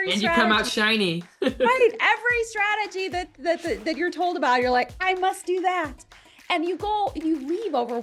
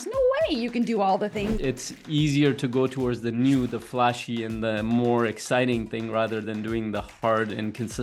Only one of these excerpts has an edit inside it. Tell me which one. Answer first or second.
second